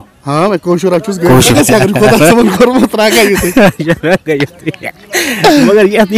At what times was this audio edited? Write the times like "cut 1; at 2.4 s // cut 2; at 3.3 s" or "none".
cut 1; at 1.5 s